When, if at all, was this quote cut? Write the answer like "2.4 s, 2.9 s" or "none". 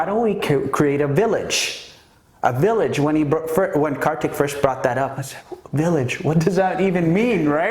none